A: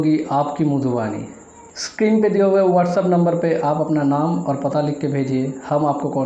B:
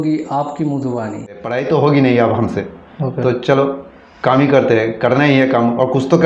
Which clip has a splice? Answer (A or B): B